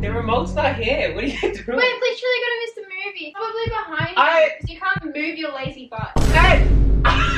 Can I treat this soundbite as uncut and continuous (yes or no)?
no